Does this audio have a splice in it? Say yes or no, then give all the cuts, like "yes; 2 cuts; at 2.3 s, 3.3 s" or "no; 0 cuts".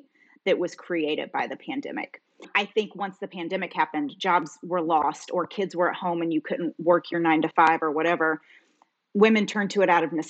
yes; 2 cuts; at 2.5 s, 4.1 s